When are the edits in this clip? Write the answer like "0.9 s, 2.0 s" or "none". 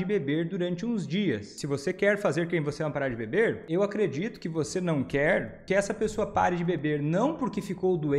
1.5 s, 3.6 s, 5.5 s